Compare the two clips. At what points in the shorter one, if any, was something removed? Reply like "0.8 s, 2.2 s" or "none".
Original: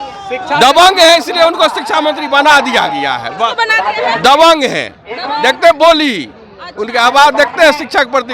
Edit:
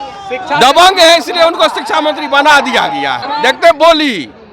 3.2 s